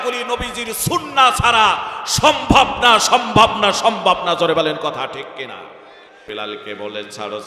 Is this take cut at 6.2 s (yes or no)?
yes